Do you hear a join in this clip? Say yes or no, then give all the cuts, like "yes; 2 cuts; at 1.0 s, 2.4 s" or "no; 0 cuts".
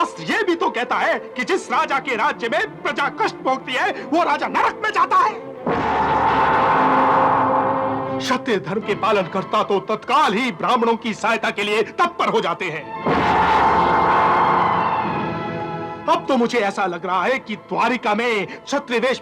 no; 0 cuts